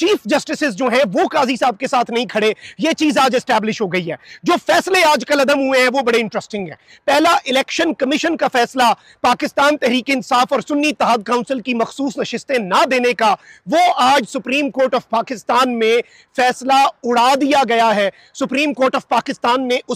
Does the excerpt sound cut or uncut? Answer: uncut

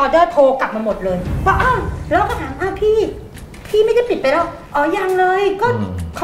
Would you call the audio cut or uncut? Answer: uncut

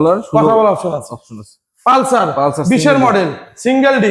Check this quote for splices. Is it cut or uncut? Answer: uncut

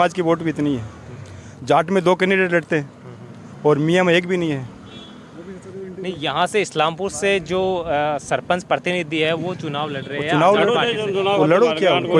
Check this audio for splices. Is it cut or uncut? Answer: uncut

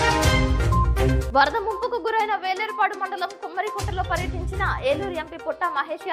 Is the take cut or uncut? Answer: uncut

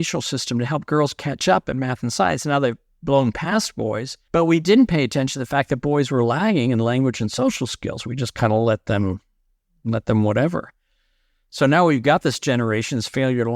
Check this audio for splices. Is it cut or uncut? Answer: cut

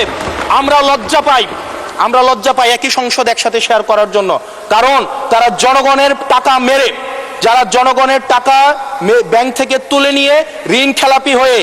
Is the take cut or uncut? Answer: uncut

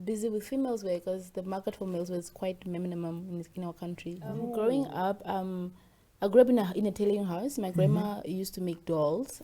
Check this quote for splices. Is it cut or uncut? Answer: cut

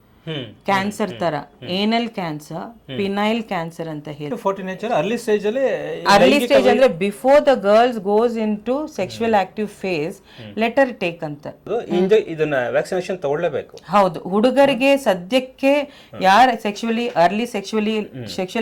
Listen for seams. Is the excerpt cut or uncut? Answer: cut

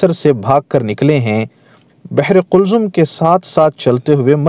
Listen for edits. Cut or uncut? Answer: cut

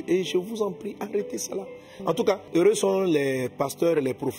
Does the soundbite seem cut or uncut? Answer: cut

